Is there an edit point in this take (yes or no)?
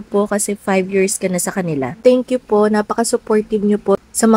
yes